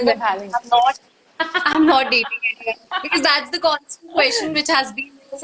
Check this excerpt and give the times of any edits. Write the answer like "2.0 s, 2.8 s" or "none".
none